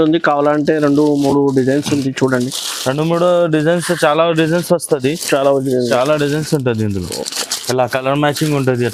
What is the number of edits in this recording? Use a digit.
0